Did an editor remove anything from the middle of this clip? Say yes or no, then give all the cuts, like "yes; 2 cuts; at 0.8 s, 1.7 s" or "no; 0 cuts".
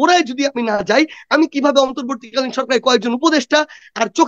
no; 0 cuts